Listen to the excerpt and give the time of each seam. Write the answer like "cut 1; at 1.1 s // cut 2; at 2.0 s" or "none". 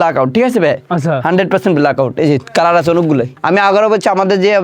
cut 1; at 3.3 s